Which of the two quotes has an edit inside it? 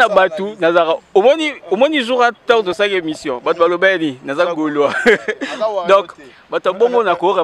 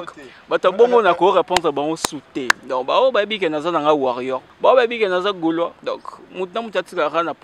second; 2 cuts; at 4.4 s, 5.8 s

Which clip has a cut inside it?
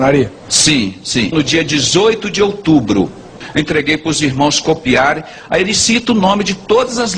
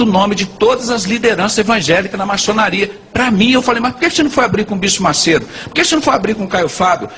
first; 1 cut; at 3.4 s

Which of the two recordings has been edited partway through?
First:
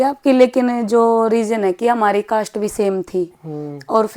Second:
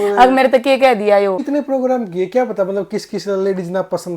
second; 1 cut; at 1.4 s

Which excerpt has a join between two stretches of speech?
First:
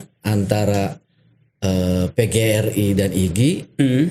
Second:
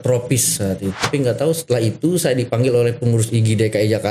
second; 1 cut; at 1.0 s

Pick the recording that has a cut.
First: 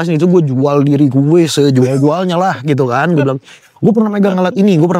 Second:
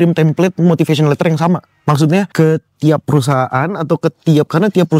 second; 1 cut; at 2.3 s

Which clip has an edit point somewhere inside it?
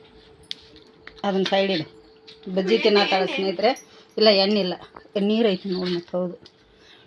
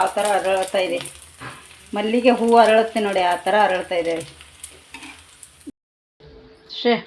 second; 1 cut; at 5.7 s

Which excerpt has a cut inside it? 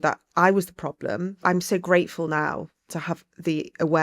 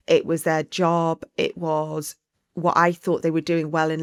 first; 2 cuts; at 1.4 s, 2.8 s

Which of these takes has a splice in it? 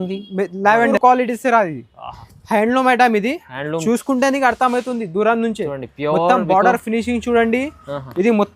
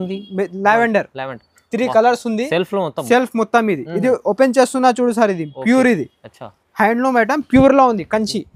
first; 1 cut; at 1.0 s

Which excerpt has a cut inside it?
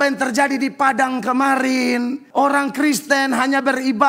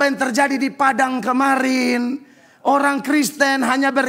first; 1 cut; at 2.2 s

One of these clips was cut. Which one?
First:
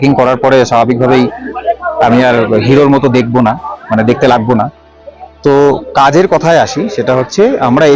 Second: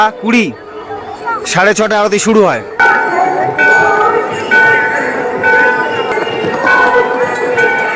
second; 2 cuts; at 2.7 s, 6.1 s

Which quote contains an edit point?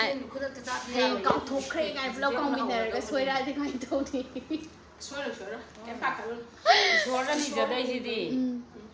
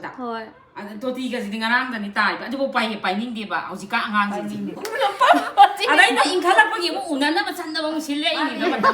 second; 1 cut; at 4.8 s

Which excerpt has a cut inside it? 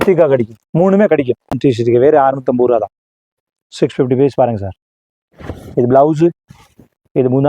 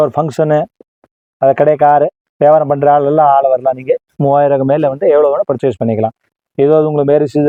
first; 1 cut; at 1.6 s

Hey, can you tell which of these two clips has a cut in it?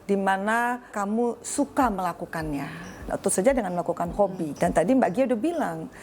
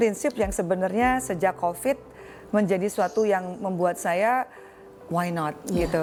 first; 3 cuts; at 0.9 s, 3.1 s, 4.5 s

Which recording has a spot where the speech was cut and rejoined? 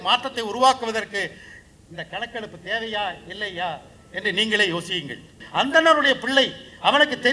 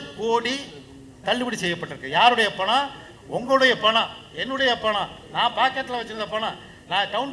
first; 1 cut; at 5.4 s

